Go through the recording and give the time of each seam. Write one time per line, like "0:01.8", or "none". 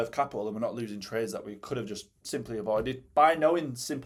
none